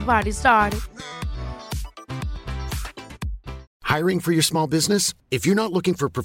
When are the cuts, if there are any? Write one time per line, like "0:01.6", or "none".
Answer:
0:03.6